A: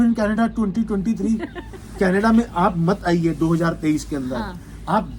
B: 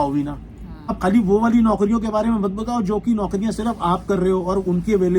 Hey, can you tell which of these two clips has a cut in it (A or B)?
B